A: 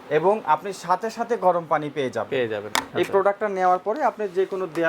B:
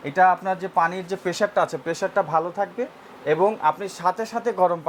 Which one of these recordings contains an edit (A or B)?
A